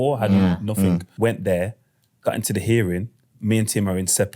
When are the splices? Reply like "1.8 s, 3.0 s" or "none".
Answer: 1.1 s